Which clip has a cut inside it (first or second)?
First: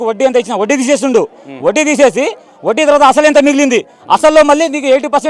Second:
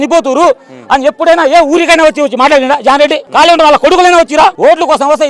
second